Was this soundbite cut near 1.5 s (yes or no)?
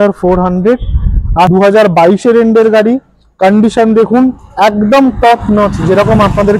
yes